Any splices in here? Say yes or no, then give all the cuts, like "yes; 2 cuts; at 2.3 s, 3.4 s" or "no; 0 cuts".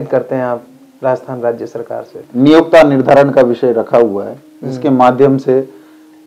yes; 1 cut; at 2.2 s